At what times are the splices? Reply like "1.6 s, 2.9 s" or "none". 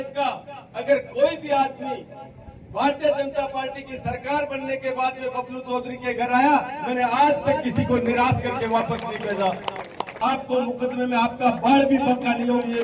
10.2 s